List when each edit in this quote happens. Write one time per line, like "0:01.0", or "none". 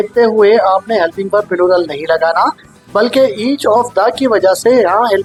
none